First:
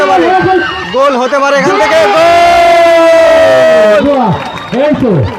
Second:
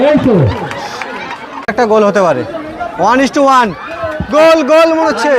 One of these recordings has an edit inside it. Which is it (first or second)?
second